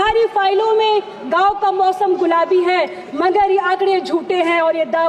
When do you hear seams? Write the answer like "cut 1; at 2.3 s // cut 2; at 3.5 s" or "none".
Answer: none